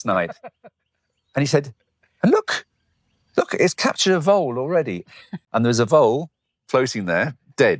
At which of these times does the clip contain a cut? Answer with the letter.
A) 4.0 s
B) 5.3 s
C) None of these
B